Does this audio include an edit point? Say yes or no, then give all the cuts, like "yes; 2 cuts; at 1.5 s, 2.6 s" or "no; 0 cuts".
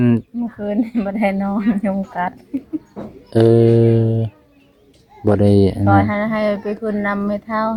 no; 0 cuts